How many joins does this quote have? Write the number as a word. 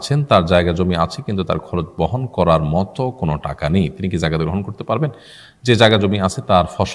zero